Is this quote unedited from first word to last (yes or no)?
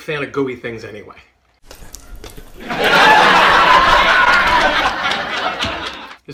yes